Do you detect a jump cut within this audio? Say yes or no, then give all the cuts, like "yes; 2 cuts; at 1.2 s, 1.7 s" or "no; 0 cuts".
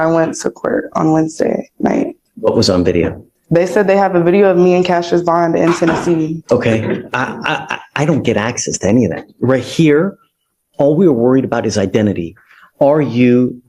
yes; 2 cuts; at 2.2 s, 6.4 s